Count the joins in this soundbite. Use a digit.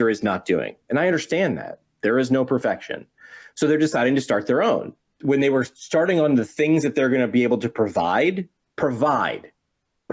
1